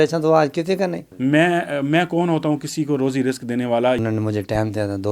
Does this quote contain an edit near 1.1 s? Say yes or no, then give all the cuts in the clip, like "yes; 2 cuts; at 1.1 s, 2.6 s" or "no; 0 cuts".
yes; 2 cuts; at 1.1 s, 4.0 s